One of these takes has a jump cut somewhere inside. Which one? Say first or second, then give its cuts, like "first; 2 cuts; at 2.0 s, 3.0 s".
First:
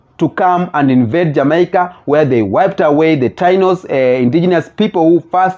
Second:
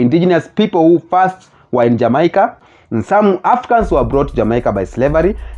second; 1 cut; at 2.6 s